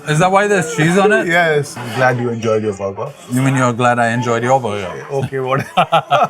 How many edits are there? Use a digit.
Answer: 2